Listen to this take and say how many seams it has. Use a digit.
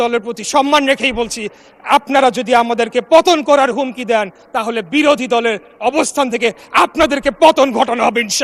0